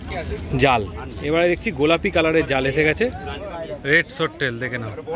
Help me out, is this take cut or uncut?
cut